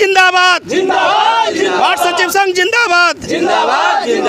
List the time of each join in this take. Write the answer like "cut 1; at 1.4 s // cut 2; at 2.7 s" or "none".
none

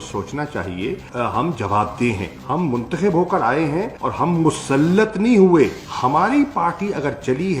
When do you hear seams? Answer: cut 1; at 5.8 s

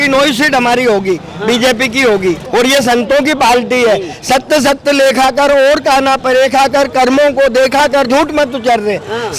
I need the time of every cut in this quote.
cut 1; at 2.4 s

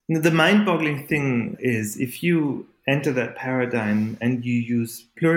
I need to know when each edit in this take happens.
cut 1; at 1.5 s

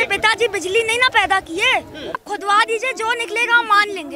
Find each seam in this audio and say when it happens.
cut 1; at 2.2 s

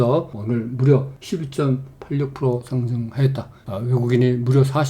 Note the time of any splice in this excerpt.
cut 1; at 1.2 s // cut 2; at 3.7 s

